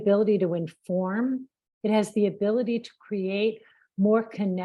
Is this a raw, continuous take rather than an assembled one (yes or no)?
yes